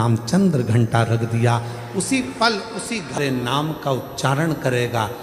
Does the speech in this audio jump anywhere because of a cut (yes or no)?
yes